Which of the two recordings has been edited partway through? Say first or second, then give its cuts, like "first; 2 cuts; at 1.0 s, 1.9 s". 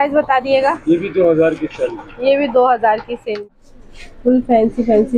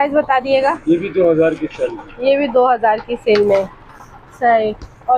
first; 1 cut; at 3.5 s